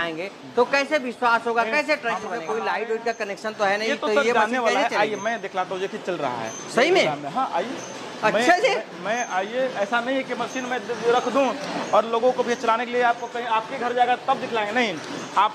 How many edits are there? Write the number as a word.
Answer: one